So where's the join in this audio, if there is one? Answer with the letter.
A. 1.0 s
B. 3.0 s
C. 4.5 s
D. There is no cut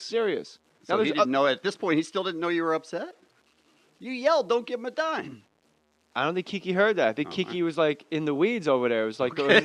C